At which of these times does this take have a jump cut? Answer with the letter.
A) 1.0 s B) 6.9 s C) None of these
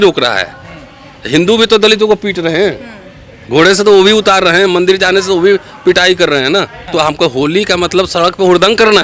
B